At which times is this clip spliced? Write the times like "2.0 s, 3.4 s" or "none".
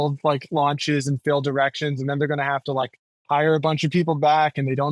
none

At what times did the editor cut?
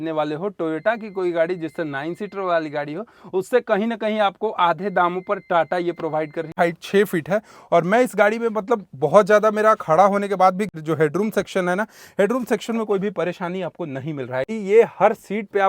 6.6 s, 10.7 s, 14.6 s

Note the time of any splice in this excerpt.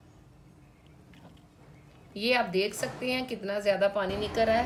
none

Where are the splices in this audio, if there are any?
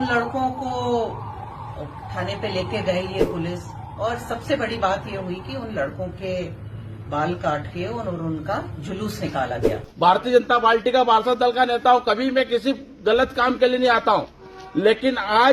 9.9 s

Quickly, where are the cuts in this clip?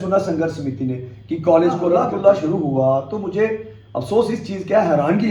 2.0 s

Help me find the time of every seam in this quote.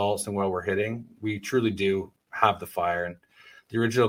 none

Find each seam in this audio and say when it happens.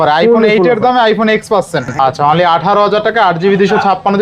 1.8 s

